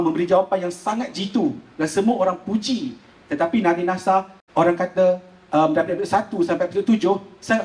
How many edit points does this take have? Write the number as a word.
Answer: one